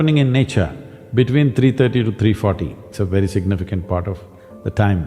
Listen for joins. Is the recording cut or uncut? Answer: cut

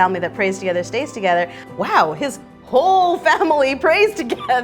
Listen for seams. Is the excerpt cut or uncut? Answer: cut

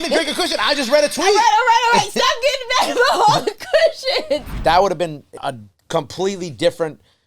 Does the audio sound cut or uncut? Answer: cut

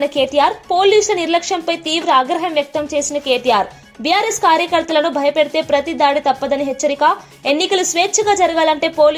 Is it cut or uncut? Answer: uncut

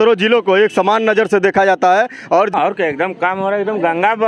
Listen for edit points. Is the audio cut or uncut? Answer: cut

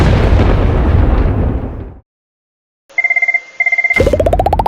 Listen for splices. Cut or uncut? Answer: cut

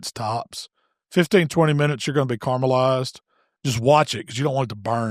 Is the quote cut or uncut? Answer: uncut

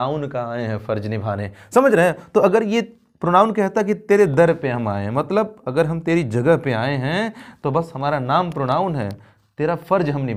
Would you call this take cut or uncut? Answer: uncut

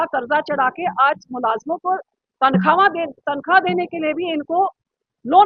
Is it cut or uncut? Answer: uncut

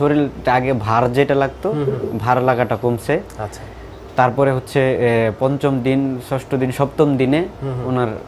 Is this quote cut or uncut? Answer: uncut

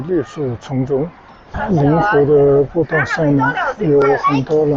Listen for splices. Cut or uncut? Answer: cut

